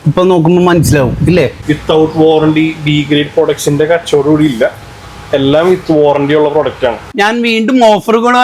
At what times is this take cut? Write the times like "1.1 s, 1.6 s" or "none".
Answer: 1.6 s, 7.0 s